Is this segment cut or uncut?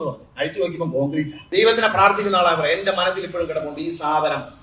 cut